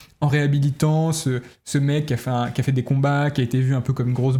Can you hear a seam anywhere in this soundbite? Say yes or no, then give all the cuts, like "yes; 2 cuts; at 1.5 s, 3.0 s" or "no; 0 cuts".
no; 0 cuts